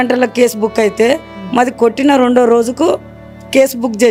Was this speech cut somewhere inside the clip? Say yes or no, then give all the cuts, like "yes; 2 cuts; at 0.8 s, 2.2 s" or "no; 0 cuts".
no; 0 cuts